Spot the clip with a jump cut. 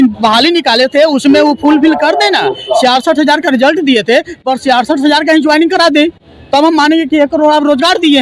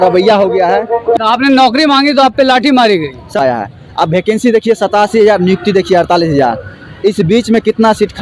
second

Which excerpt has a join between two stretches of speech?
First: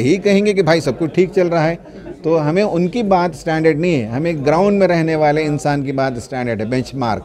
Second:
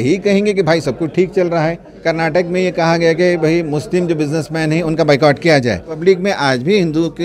second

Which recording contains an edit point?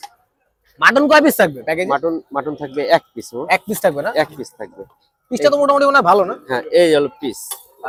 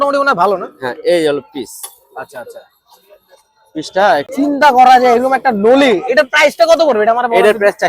second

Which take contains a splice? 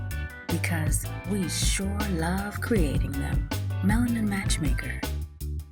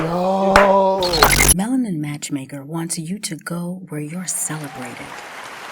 second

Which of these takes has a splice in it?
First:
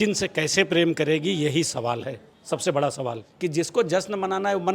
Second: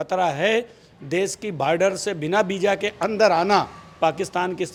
first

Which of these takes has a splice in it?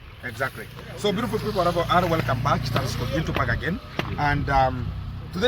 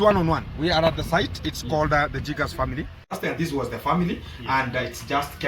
second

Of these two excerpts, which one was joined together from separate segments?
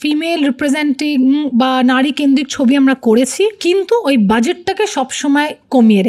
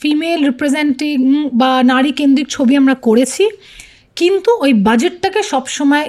first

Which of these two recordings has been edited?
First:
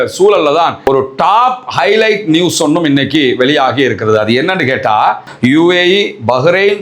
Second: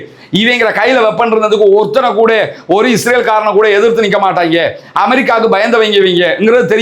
first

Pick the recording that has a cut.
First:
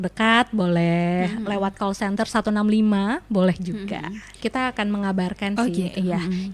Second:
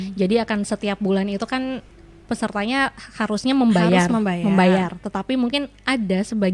first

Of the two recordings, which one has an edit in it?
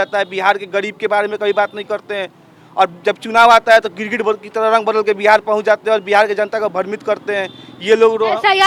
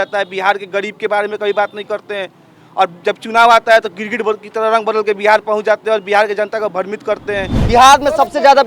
second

